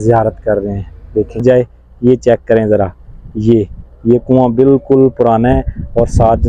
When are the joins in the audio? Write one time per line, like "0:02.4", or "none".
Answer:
0:01.4